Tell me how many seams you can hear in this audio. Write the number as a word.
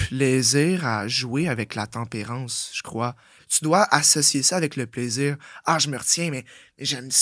one